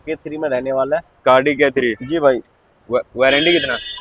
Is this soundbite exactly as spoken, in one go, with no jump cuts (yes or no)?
yes